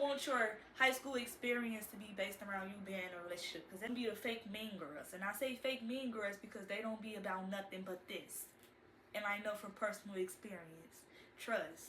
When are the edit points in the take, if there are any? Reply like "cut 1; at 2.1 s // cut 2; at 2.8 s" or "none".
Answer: cut 1; at 3.9 s